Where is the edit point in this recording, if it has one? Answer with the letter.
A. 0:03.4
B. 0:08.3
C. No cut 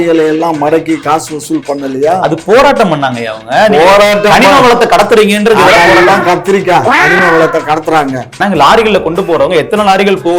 B